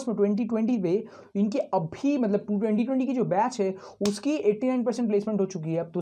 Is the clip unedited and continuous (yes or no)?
yes